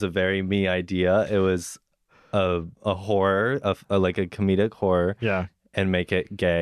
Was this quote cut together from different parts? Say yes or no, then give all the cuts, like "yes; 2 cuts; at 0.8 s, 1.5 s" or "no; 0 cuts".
no; 0 cuts